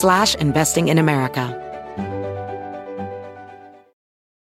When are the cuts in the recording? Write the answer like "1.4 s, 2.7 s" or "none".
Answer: 1.5 s